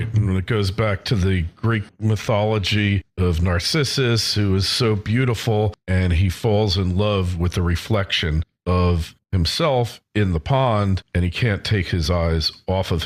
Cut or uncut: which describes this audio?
uncut